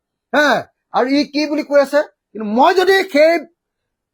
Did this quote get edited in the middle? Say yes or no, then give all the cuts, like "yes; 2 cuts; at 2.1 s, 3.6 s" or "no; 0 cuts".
no; 0 cuts